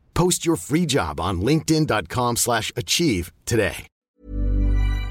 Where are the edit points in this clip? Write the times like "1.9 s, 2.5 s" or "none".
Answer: 3.9 s